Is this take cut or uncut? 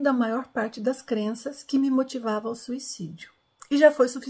uncut